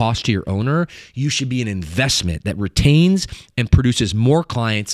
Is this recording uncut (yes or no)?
yes